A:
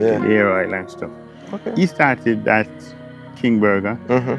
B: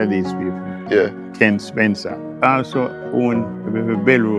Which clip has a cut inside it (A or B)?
B